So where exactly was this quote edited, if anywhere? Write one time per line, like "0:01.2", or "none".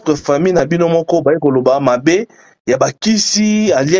none